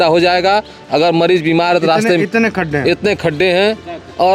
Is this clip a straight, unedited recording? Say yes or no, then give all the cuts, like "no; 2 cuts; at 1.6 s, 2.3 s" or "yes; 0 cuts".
yes; 0 cuts